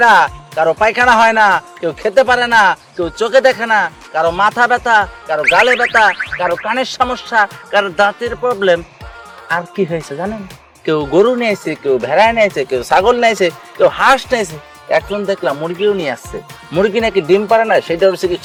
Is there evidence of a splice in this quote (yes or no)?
no